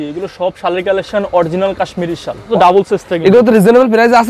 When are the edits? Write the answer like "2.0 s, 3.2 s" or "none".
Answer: 2.5 s